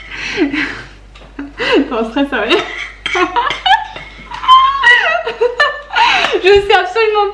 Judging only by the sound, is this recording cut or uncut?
uncut